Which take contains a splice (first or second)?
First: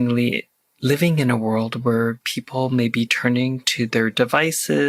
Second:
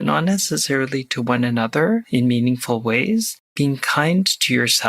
second